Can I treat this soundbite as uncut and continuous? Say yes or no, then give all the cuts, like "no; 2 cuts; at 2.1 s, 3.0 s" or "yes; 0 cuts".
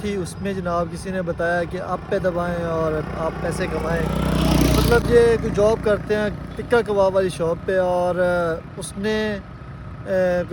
yes; 0 cuts